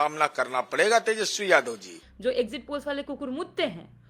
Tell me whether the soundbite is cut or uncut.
cut